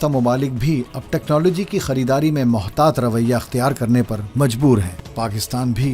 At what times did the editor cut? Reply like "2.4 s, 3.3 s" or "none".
5.0 s